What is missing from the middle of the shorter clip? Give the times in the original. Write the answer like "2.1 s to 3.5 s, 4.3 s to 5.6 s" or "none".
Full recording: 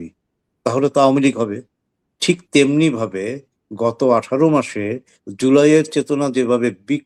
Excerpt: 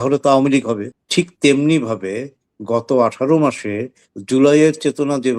1.7 s to 2.1 s